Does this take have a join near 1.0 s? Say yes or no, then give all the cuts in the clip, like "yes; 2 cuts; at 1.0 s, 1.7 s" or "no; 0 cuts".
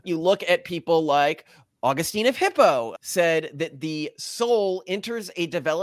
no; 1 cut; at 2.9 s